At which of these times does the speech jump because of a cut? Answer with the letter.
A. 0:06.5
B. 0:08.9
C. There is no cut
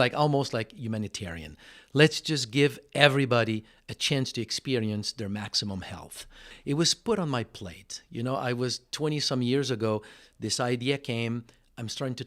A